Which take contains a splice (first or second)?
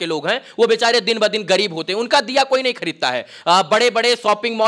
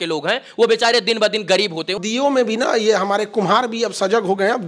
second